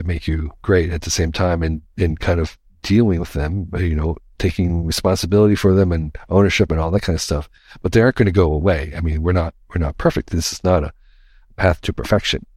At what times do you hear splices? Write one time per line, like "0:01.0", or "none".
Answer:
none